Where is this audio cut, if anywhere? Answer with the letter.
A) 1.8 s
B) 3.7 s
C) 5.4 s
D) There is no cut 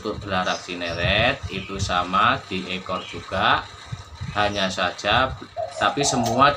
C